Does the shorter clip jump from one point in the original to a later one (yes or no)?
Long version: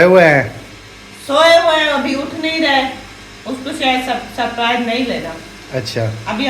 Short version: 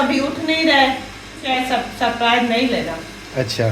yes